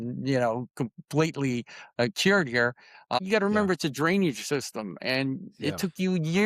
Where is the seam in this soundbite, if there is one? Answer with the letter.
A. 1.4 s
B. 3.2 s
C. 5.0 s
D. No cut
B